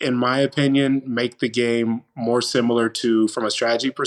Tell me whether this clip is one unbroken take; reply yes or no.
yes